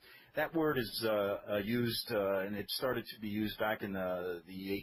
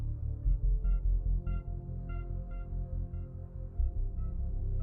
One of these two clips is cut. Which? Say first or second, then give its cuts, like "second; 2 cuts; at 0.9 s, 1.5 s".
second; 1 cut; at 0.9 s